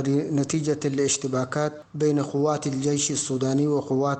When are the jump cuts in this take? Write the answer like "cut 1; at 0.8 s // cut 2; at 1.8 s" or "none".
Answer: cut 1; at 1.8 s